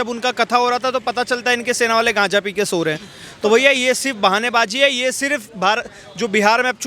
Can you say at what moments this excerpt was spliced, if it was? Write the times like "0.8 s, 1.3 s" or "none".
none